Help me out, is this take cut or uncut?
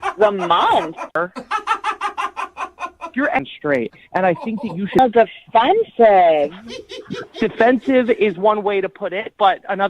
cut